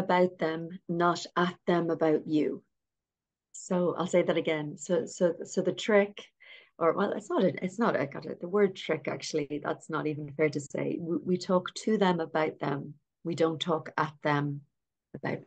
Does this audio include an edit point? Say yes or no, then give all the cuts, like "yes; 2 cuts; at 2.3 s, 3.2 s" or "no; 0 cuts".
no; 0 cuts